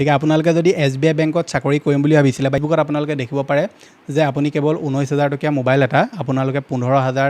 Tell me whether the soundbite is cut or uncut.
cut